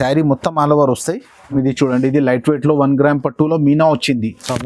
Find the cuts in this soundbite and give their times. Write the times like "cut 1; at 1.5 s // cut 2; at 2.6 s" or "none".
cut 1; at 1.5 s